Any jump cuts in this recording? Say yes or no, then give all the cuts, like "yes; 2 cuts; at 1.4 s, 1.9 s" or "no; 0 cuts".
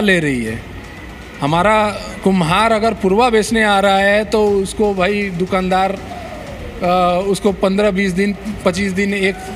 no; 0 cuts